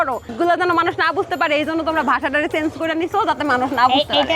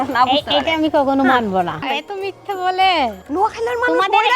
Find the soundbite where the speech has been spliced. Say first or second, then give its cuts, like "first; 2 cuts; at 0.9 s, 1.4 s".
second; 2 cuts; at 1.9 s, 3.2 s